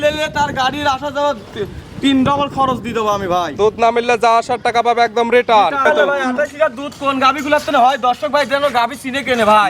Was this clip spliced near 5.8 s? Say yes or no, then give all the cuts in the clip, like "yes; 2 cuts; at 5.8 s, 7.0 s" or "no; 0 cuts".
yes; 1 cut; at 5.8 s